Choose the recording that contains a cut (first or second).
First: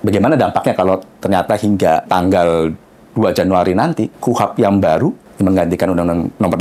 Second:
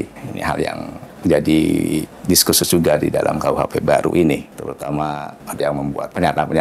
first